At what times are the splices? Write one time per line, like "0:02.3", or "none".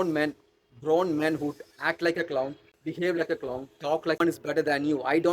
0:02.6
0:04.2